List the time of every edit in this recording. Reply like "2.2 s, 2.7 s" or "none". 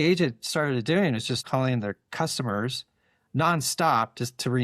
1.4 s